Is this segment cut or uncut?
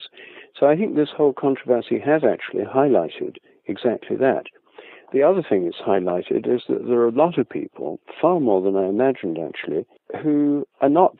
uncut